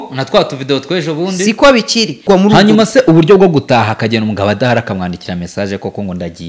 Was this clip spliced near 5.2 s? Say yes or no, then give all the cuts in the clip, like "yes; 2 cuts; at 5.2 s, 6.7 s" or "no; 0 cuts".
no; 1 cut; at 2.2 s